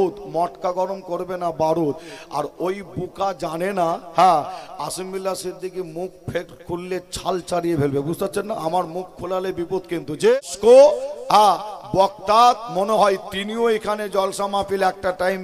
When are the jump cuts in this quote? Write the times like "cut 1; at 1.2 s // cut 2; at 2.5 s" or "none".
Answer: cut 1; at 10.3 s